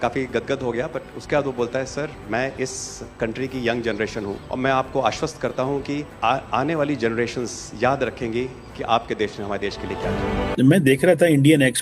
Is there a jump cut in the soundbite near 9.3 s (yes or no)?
no